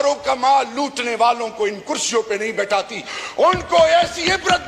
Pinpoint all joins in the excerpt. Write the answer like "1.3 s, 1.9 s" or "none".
none